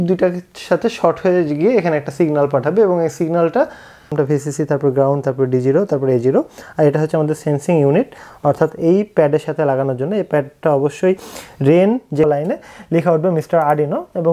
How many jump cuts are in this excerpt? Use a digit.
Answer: 2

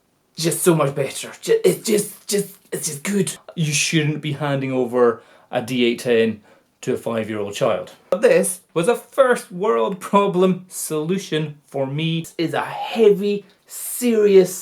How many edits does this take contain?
3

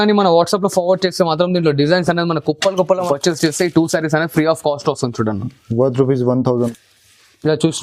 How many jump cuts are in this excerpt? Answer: 2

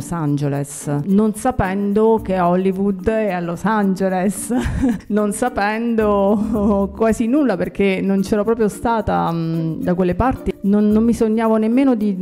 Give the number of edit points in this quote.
3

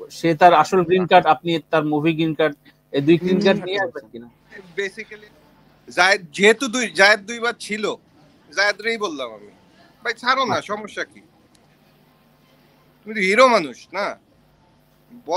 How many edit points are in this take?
1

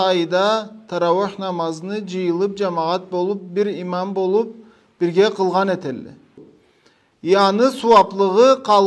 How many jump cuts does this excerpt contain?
1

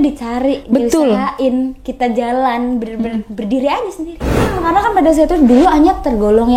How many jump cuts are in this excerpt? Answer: 1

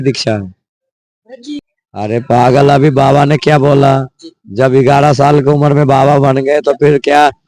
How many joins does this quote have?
1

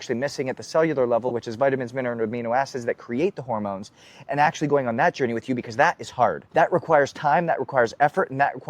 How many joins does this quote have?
1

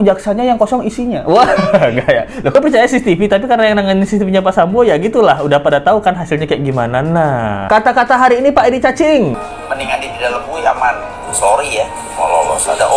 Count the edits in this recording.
2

